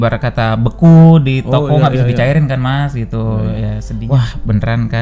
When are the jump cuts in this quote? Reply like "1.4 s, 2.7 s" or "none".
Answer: 3.9 s